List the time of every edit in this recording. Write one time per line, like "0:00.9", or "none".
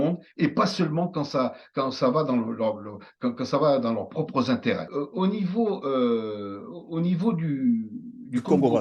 0:04.9